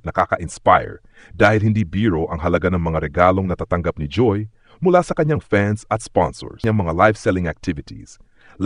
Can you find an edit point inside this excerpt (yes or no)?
yes